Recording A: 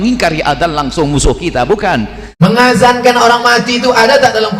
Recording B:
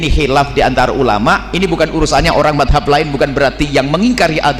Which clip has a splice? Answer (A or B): A